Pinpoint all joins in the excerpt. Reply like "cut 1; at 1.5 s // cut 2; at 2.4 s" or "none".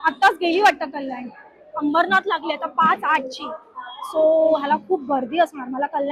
none